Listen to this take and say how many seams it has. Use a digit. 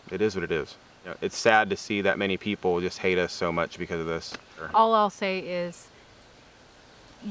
2